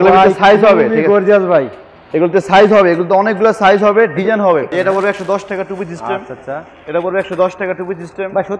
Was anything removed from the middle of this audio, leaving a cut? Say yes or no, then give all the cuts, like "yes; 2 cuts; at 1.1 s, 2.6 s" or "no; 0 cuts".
yes; 1 cut; at 4.7 s